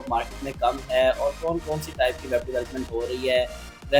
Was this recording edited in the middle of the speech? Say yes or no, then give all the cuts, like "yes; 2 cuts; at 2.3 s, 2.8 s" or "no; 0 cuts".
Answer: no; 0 cuts